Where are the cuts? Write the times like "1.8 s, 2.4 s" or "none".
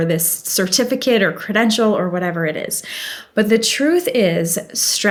none